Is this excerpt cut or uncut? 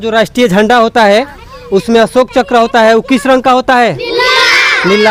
uncut